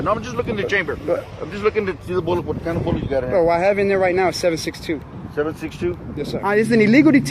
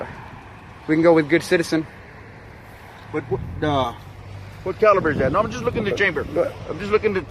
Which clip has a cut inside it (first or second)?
first